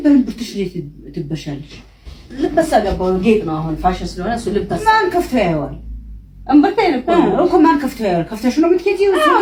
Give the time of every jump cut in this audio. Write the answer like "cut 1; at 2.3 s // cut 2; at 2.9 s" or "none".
none